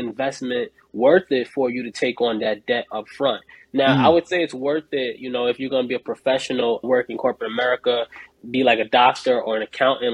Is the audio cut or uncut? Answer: uncut